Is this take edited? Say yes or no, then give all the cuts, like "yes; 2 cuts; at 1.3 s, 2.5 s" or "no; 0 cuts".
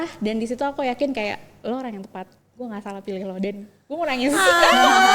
yes; 1 cut; at 1.5 s